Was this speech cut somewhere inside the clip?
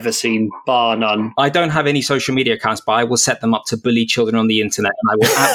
yes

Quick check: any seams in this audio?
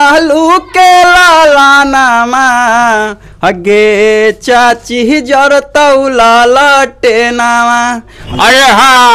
yes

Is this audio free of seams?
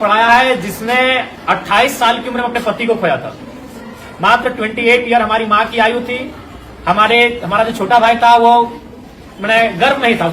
yes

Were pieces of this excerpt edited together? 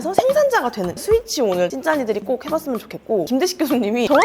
yes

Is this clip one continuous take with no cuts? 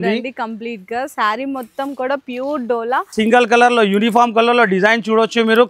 no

